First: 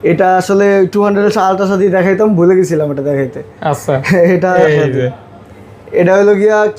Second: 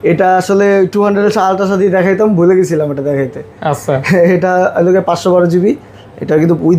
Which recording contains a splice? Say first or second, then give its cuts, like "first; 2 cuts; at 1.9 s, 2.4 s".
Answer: first; 1 cut; at 4.6 s